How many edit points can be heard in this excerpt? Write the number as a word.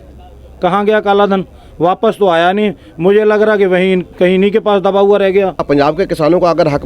one